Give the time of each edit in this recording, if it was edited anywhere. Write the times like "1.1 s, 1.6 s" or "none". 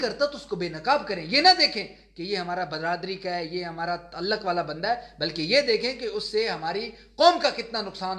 none